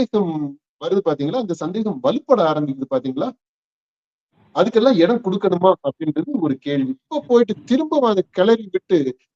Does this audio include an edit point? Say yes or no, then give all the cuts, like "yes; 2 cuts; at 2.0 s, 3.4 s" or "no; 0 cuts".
yes; 1 cut; at 7.1 s